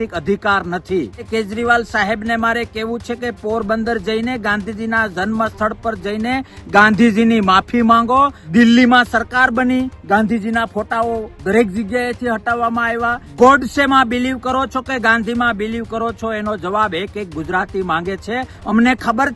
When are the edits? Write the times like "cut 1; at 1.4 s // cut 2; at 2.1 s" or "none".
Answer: cut 1; at 1.3 s // cut 2; at 8.4 s // cut 3; at 13.2 s // cut 4; at 18.5 s